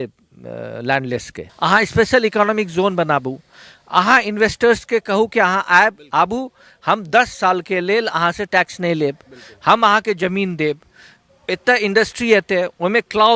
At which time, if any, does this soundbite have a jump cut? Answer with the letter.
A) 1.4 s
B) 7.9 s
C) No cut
A